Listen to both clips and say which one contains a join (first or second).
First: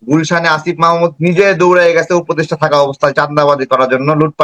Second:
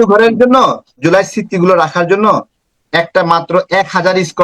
second